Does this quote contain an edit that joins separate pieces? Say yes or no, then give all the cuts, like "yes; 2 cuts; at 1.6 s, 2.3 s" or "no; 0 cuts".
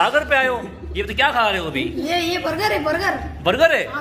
no; 0 cuts